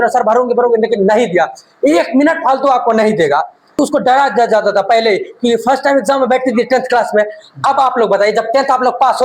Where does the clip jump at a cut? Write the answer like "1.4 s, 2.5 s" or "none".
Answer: 3.8 s